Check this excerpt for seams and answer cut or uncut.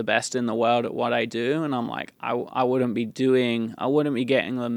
uncut